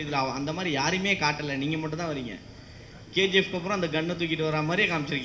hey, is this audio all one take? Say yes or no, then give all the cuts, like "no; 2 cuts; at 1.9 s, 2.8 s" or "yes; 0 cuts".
yes; 0 cuts